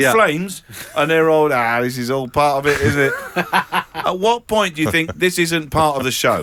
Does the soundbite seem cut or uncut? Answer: uncut